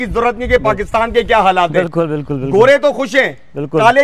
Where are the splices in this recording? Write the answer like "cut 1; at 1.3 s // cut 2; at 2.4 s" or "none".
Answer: none